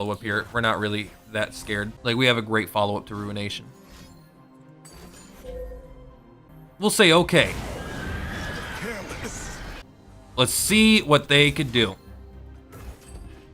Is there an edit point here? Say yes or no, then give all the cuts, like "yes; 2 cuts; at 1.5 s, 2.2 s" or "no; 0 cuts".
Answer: yes; 3 cuts; at 1.9 s, 6.5 s, 9.8 s